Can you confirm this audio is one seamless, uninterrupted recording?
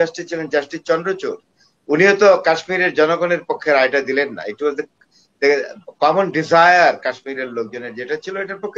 yes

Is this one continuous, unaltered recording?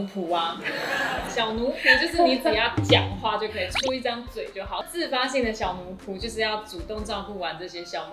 no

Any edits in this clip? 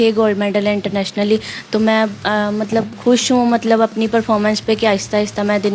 no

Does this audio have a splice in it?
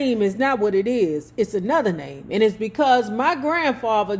no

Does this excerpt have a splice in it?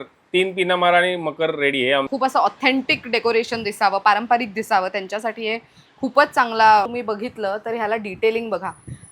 yes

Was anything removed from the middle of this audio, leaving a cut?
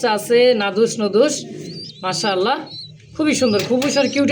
no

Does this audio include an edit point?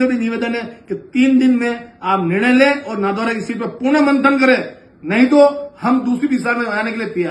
no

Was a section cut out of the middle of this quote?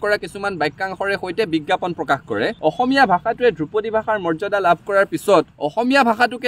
yes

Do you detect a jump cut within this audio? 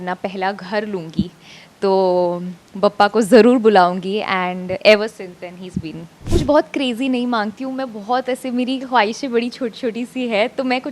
yes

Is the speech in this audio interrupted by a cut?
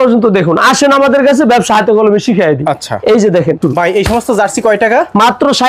yes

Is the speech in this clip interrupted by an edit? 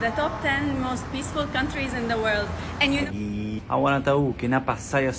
yes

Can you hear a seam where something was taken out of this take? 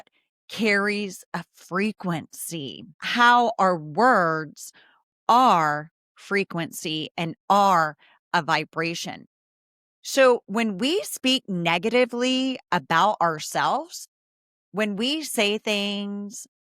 yes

